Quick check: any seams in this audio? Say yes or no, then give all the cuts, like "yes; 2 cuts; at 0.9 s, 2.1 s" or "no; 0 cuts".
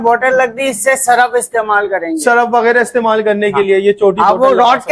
no; 0 cuts